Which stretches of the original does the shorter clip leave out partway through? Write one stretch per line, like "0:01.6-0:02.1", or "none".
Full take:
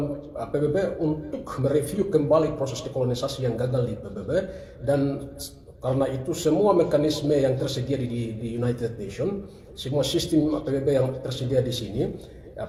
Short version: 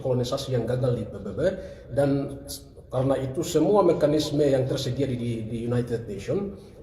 none